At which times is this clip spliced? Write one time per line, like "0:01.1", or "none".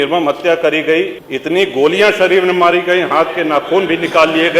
0:01.3